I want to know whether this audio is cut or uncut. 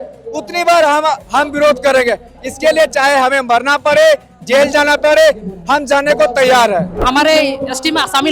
cut